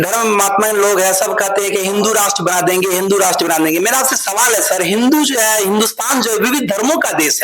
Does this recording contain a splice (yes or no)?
no